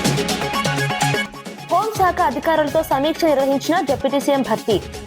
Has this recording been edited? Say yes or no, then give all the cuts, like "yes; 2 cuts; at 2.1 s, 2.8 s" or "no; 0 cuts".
yes; 1 cut; at 1.2 s